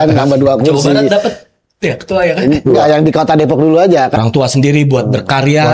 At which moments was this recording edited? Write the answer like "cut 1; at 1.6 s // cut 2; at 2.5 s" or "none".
cut 1; at 4.2 s